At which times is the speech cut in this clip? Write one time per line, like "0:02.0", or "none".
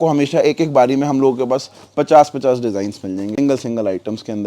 0:03.4